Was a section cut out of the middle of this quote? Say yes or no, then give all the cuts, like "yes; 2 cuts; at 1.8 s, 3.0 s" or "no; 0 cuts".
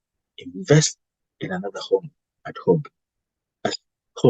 no; 0 cuts